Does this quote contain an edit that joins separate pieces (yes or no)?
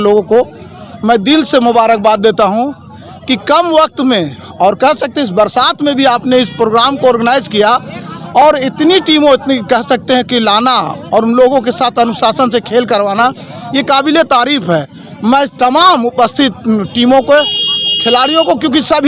no